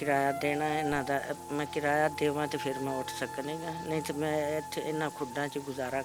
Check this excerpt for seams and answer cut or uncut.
uncut